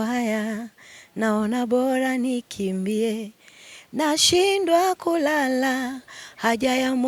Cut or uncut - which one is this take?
uncut